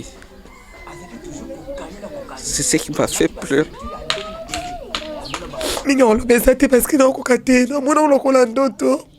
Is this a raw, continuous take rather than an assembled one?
no; 1 cut; at 5.8 s

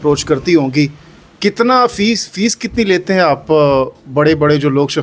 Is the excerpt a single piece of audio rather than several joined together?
yes; 0 cuts

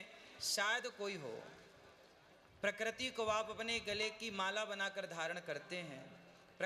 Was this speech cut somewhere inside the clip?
no; 0 cuts

